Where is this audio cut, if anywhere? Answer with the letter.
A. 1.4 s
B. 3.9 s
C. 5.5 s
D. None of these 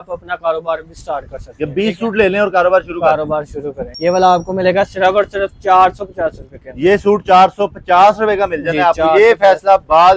B